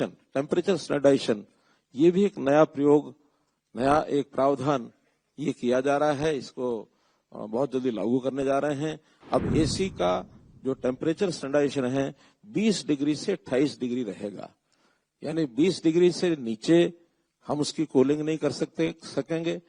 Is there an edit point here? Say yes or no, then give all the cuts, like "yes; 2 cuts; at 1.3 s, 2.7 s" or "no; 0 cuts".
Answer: no; 0 cuts